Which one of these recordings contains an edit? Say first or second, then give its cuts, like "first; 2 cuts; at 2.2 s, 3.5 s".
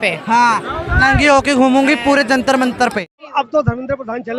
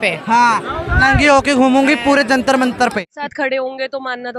second; 1 cut; at 3.2 s